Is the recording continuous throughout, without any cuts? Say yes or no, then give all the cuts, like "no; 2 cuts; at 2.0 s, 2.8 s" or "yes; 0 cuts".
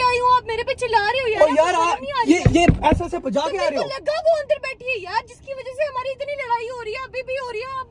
yes; 0 cuts